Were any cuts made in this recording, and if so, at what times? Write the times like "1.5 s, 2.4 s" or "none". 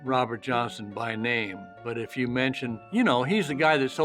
1.6 s